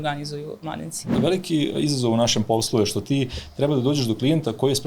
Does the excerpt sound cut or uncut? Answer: cut